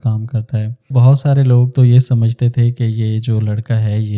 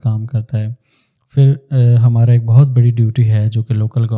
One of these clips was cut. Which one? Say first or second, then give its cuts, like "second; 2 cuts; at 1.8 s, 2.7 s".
first; 1 cut; at 0.9 s